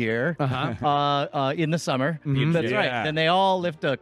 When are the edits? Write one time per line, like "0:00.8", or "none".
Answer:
0:02.5